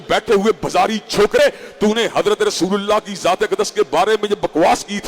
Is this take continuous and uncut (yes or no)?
no